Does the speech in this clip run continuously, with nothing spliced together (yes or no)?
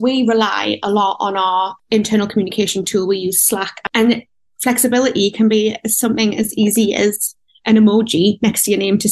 yes